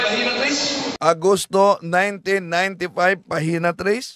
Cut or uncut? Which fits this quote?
uncut